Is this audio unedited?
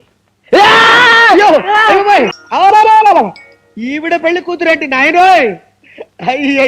no; 1 cut; at 2.4 s

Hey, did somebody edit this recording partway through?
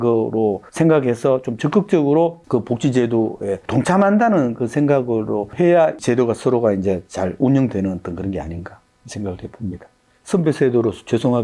no; 0 cuts

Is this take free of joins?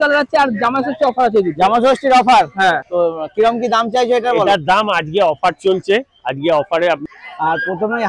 no; 2 cuts; at 2.8 s, 7.0 s

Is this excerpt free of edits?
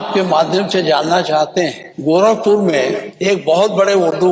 no; 2 cuts; at 1.9 s, 3.1 s

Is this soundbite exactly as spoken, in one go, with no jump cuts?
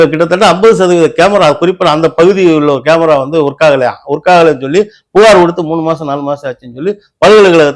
yes; 0 cuts

